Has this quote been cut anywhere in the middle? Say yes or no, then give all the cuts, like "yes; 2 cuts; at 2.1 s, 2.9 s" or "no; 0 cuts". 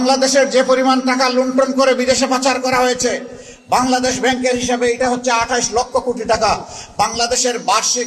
no; 0 cuts